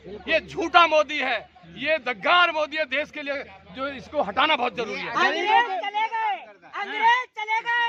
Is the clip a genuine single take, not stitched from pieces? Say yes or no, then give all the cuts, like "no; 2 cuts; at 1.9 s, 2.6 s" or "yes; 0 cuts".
yes; 0 cuts